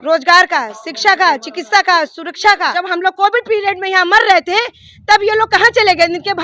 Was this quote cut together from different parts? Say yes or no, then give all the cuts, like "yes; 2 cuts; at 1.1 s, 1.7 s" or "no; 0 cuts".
yes; 1 cut; at 2.7 s